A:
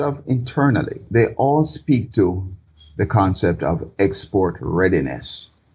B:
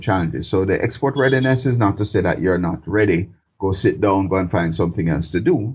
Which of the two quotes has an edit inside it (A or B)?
A